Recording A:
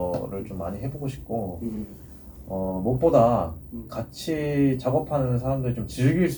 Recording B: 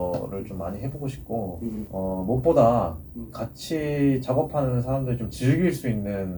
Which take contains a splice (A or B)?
B